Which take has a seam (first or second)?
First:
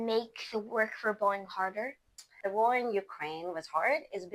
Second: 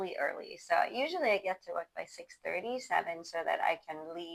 first